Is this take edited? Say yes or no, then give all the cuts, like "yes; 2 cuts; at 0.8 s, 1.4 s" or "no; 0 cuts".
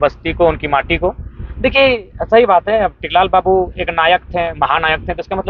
no; 0 cuts